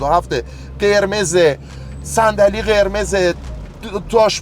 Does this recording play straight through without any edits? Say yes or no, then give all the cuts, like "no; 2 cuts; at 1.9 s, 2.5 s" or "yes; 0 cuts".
yes; 0 cuts